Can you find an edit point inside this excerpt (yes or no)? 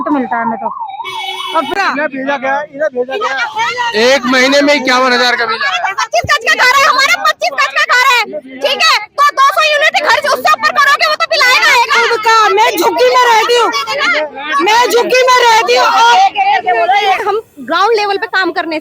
yes